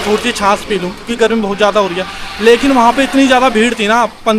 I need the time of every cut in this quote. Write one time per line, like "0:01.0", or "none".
none